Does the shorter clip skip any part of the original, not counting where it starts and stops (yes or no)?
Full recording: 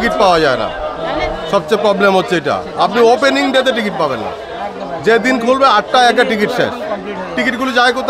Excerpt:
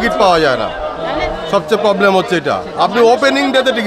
no